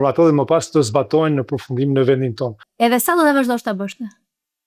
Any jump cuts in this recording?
yes; 1 cut; at 2.6 s

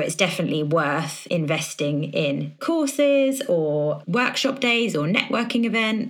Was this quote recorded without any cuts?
no; 3 cuts; at 1.1 s, 2.6 s, 4.0 s

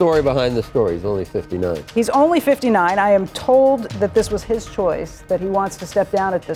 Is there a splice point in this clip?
no; 0 cuts

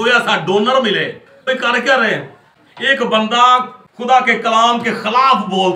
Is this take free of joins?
yes; 0 cuts

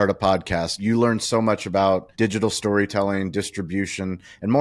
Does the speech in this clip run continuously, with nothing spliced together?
no; 2 cuts; at 0.8 s, 2.1 s

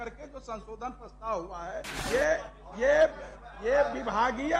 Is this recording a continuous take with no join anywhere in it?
no; 1 cut; at 2.0 s

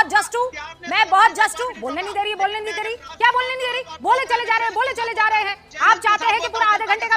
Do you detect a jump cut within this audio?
no; 0 cuts

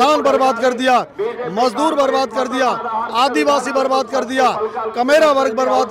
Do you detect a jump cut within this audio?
no; 0 cuts

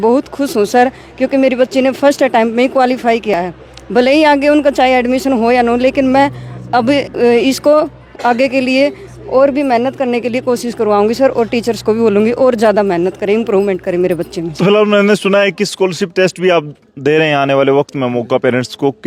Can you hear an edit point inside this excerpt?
no; 0 cuts

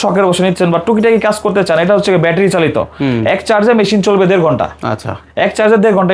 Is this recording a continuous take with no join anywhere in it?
yes; 0 cuts

